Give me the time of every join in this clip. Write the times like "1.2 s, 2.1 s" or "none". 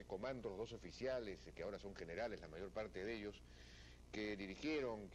3.6 s